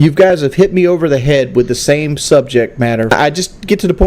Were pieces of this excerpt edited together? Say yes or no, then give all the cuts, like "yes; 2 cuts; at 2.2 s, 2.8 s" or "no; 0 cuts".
yes; 1 cut; at 3.1 s